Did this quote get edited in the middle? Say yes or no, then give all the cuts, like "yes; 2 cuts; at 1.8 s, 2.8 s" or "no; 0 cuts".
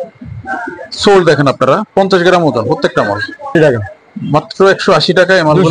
yes; 1 cut; at 3.5 s